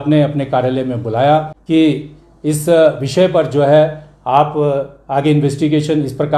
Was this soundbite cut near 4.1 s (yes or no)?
no